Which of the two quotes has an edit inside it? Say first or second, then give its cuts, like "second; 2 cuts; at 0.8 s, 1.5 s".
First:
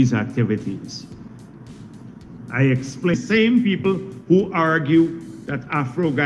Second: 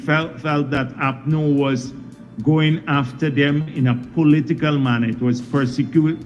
first; 1 cut; at 3.1 s